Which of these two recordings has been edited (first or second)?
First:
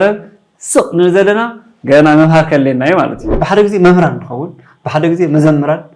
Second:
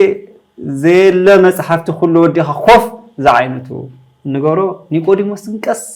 first